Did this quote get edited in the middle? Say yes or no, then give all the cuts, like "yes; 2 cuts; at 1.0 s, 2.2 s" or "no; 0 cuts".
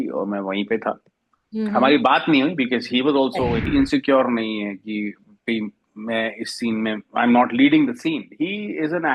yes; 1 cut; at 3.6 s